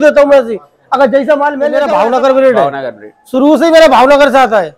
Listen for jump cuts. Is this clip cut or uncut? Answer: cut